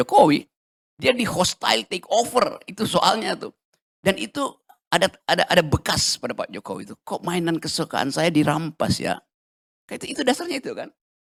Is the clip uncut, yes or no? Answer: yes